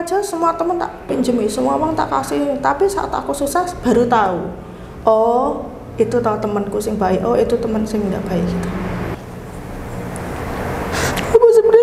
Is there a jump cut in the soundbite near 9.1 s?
yes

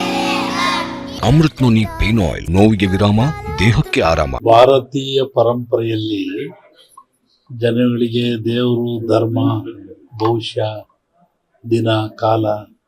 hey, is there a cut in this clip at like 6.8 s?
no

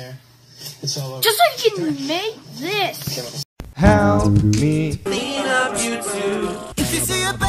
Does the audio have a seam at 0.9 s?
no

